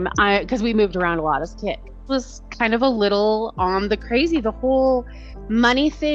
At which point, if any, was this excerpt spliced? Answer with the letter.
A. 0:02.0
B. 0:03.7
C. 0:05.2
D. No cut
A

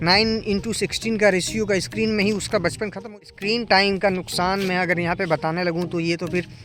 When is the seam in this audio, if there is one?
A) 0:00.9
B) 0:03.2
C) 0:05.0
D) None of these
B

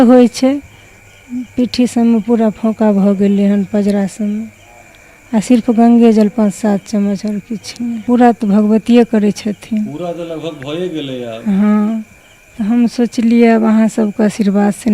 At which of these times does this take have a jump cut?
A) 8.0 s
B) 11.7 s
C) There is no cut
A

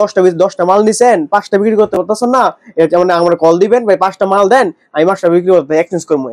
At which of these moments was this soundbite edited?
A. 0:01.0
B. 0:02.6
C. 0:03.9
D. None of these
D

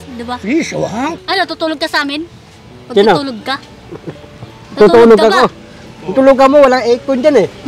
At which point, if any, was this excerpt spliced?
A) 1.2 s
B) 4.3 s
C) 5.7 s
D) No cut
A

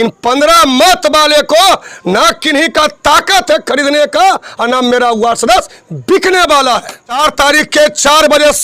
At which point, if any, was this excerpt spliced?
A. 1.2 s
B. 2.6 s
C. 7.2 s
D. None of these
C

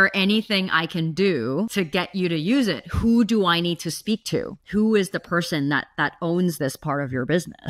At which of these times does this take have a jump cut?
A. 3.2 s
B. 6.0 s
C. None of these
C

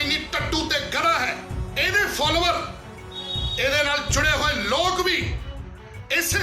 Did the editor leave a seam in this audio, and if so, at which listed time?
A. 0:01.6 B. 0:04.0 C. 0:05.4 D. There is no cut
A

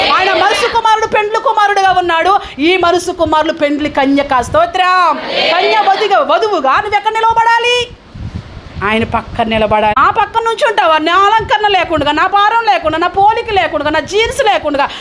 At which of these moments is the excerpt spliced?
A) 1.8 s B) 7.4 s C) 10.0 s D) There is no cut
C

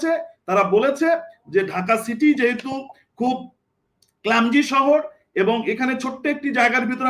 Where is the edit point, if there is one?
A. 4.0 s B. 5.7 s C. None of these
C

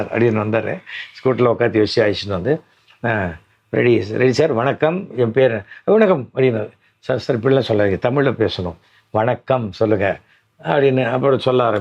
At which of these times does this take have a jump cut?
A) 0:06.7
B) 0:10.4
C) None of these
C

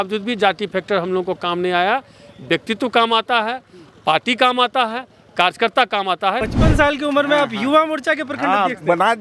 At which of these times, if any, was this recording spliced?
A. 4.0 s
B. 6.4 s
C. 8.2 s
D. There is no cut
B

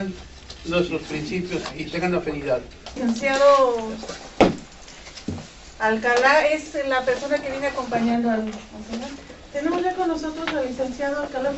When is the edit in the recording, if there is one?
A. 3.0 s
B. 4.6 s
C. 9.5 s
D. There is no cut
A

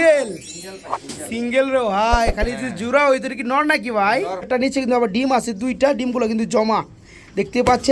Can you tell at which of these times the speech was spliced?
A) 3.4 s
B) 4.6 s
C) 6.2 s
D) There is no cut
B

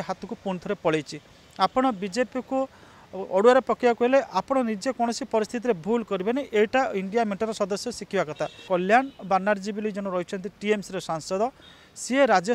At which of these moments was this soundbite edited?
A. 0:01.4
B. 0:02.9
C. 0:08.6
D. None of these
C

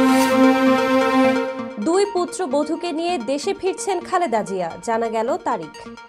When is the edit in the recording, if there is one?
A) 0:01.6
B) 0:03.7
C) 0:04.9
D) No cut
A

